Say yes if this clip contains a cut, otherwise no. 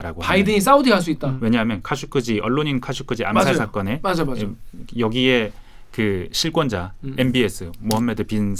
no